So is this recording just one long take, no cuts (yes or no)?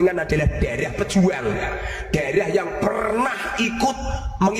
yes